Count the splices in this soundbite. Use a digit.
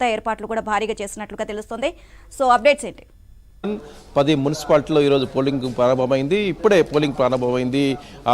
1